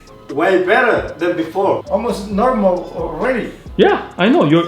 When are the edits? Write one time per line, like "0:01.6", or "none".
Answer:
0:01.8